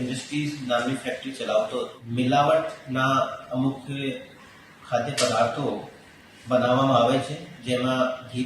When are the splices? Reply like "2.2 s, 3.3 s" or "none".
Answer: 2.0 s